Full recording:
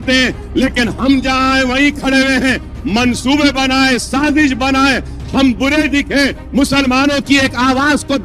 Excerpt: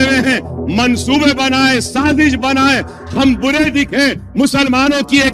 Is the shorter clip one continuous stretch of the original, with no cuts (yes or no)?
yes